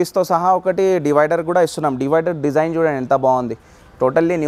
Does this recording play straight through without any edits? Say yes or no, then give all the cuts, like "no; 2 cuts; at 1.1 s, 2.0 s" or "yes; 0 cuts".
yes; 0 cuts